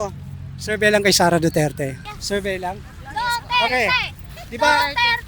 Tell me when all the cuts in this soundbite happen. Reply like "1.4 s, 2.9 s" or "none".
2.1 s